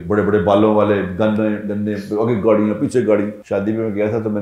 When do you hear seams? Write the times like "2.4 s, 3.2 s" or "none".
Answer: 3.4 s